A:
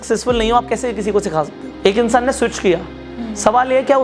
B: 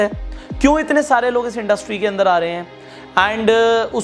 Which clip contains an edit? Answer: A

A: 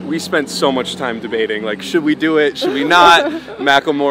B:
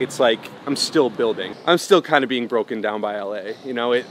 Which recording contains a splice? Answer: B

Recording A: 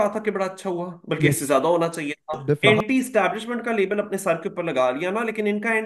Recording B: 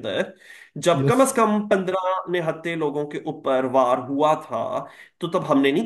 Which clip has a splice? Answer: A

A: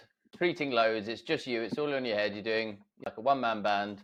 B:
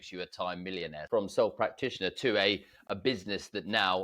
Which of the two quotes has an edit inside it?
B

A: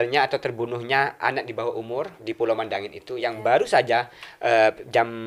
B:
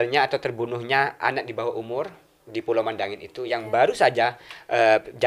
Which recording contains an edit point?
A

